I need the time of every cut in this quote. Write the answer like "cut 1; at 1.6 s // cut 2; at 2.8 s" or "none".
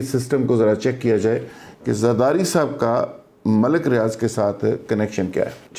none